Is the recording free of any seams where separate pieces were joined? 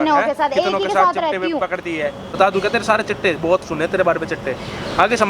no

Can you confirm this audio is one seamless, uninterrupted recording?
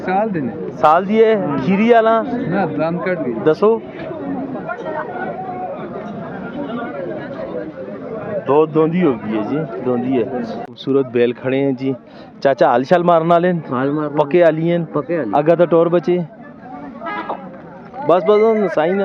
no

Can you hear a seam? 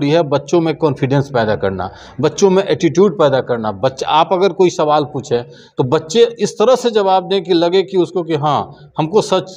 no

